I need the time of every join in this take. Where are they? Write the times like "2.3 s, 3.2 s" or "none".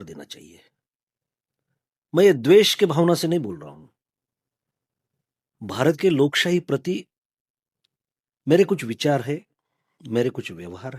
none